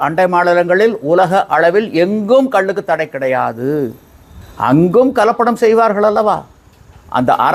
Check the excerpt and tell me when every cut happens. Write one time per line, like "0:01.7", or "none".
none